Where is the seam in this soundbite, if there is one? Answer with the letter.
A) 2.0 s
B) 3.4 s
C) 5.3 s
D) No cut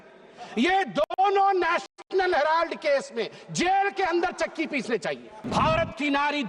C